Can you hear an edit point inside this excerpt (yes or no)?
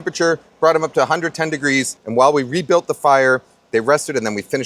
yes